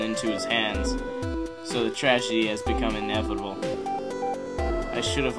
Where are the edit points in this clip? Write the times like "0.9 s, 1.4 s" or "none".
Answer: 2.6 s